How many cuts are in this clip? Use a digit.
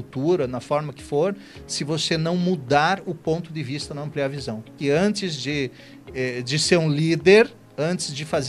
1